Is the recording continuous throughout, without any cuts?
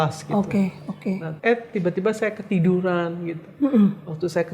no; 1 cut; at 1.3 s

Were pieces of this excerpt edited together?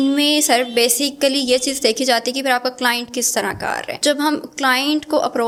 no; 0 cuts

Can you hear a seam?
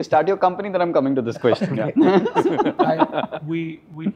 no; 0 cuts

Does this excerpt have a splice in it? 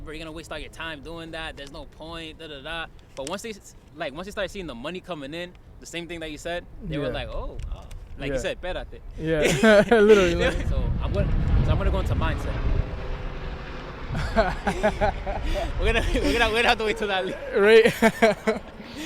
yes; 1 cut; at 10.6 s

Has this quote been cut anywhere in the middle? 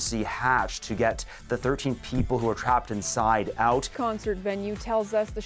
no; 0 cuts

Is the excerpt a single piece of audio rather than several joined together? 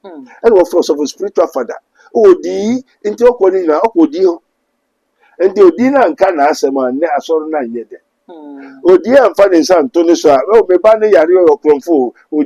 yes; 0 cuts

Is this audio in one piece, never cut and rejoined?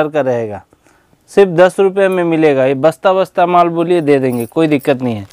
yes; 0 cuts

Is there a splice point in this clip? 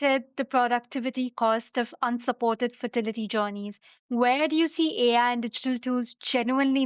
no; 0 cuts

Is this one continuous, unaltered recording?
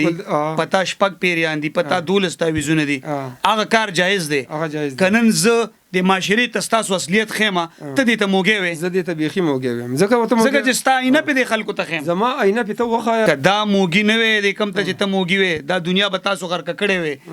no; 1 cut; at 13.3 s

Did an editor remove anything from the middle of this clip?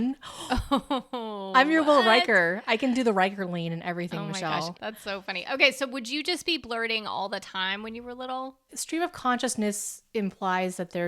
yes; 2 cuts; at 4.7 s, 8.6 s

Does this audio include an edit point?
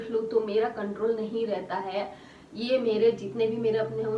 no; 0 cuts

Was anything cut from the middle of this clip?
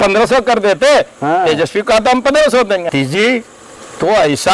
yes; 1 cut; at 2.9 s

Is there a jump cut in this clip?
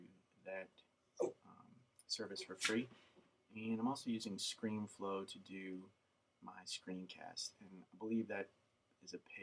yes; 1 cut; at 6.2 s

